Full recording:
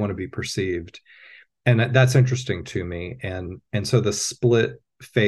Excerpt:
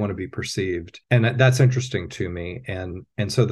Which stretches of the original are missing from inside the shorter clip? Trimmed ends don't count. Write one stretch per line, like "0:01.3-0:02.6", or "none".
0:00.9-0:01.5